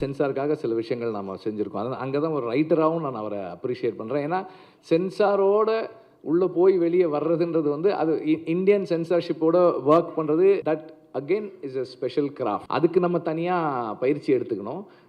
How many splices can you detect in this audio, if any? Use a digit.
2